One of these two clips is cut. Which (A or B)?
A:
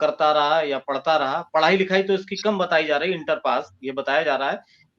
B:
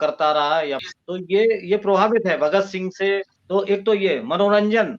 B